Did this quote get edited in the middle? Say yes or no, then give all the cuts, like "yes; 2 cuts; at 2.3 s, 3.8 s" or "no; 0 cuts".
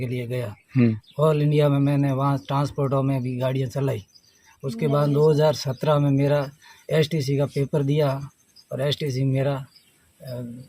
no; 0 cuts